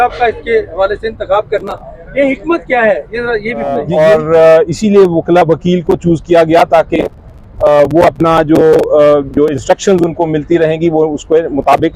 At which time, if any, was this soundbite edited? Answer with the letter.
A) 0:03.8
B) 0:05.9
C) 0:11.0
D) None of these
A